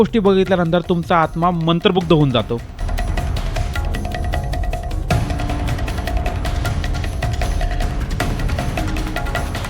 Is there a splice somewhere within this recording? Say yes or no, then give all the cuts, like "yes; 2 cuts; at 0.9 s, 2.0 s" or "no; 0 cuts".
no; 0 cuts